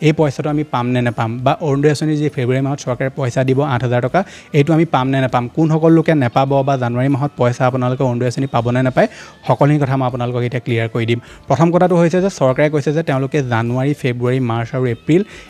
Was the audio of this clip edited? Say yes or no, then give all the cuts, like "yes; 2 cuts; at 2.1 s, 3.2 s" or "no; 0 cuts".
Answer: no; 0 cuts